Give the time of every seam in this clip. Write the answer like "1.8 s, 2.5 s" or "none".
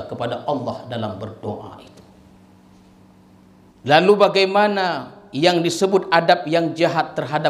3.7 s